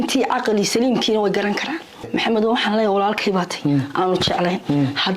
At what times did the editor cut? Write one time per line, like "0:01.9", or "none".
0:02.1